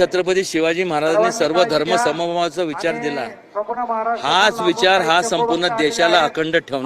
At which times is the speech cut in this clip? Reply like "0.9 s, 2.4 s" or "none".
none